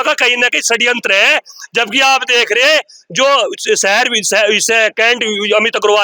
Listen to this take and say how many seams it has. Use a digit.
0